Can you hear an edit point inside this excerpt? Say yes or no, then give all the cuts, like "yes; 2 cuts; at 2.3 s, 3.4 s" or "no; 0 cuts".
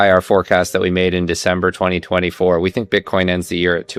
no; 0 cuts